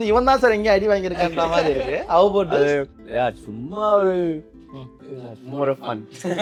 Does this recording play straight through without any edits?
yes; 0 cuts

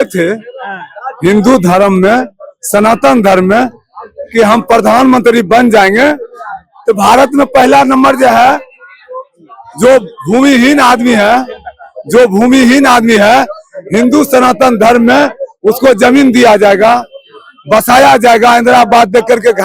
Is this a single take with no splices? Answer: yes; 0 cuts

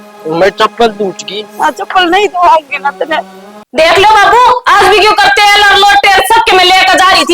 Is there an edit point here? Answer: yes; 1 cut; at 3.7 s

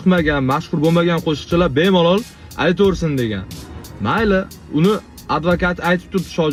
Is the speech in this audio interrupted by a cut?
no; 0 cuts

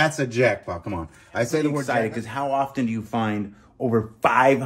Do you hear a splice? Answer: yes; 1 cut; at 1.9 s

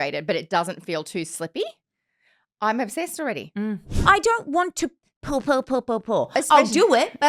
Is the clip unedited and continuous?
no; 1 cut; at 3.9 s

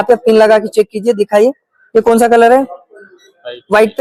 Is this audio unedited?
yes; 0 cuts

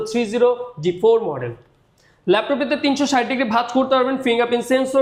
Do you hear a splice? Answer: no; 0 cuts

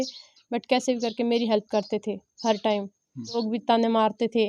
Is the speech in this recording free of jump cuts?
no; 1 cut; at 3.4 s

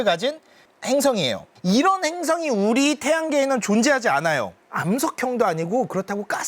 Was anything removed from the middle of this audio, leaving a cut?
yes; 1 cut; at 4.6 s

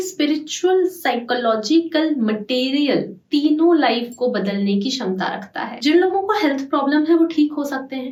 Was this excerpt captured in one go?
yes; 0 cuts

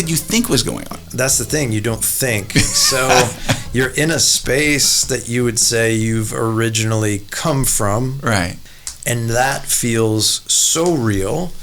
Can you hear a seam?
yes; 1 cut; at 8.6 s

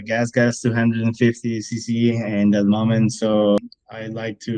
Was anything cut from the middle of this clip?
yes; 1 cut; at 3.6 s

